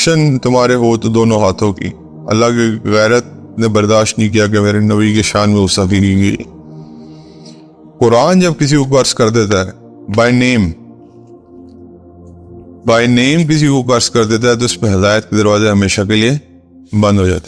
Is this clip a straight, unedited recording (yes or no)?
no